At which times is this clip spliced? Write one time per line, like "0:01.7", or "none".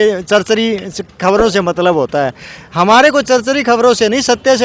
none